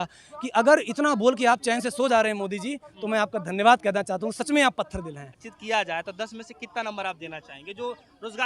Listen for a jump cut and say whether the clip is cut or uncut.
cut